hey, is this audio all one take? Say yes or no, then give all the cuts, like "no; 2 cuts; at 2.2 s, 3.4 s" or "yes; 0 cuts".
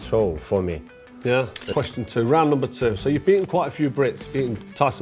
no; 1 cut; at 1.8 s